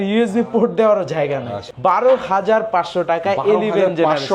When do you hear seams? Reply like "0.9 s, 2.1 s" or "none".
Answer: 1.6 s